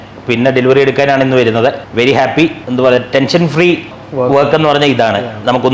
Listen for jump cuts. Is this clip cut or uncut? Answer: uncut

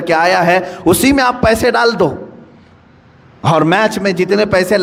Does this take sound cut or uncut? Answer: uncut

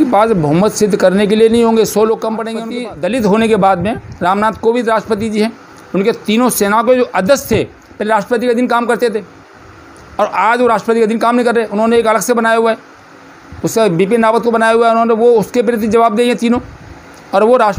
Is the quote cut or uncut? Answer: cut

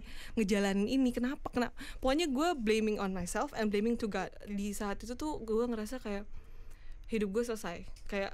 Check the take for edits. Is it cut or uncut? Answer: cut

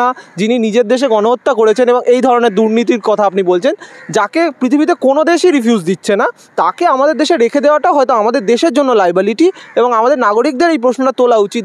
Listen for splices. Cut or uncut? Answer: uncut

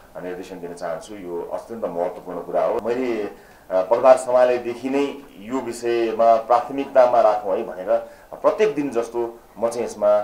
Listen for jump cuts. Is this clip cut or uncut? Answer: cut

